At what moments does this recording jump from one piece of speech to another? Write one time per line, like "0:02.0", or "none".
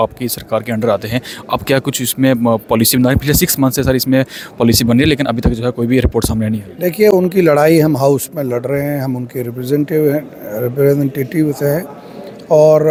none